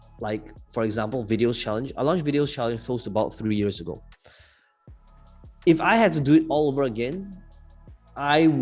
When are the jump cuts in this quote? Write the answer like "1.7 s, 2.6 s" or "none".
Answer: none